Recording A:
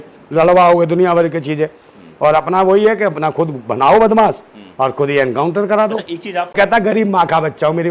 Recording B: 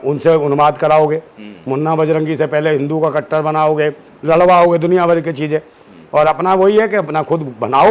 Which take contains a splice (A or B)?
A